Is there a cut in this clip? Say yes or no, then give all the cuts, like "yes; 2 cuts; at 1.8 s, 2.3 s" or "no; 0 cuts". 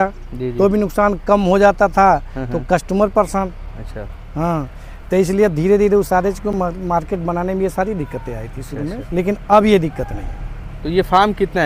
no; 0 cuts